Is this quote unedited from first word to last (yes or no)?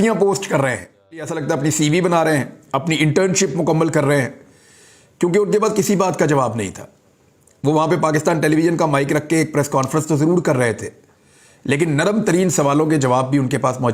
no